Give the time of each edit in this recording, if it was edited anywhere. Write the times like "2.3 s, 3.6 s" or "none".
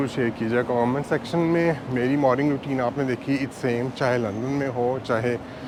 none